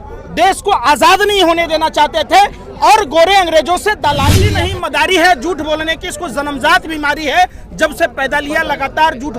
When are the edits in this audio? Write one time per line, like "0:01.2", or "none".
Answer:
0:04.6

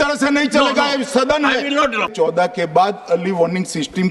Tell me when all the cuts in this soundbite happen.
0:02.1

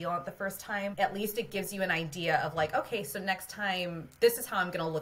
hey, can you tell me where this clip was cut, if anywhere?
0:00.9

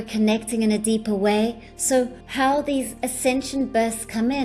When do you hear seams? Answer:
0:02.0
0:02.9

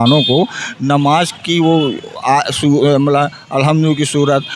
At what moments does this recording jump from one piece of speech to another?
none

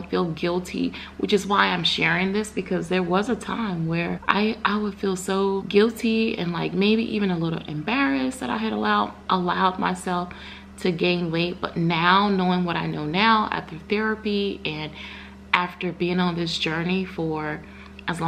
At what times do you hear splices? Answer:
0:04.2
0:05.6

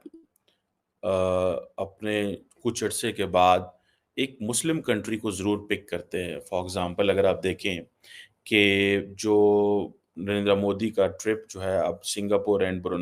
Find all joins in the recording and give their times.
none

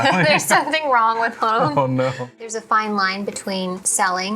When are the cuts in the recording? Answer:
0:02.4

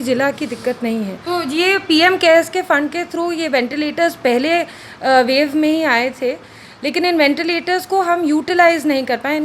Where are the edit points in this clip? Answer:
0:01.2

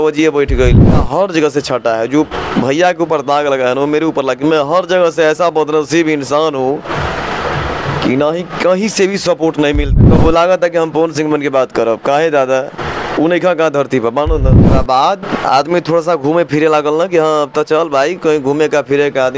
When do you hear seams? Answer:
0:01.0
0:09.9
0:14.7

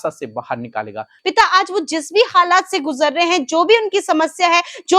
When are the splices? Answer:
0:01.1

